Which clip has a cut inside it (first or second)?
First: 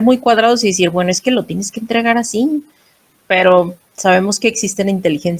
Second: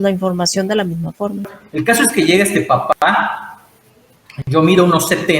second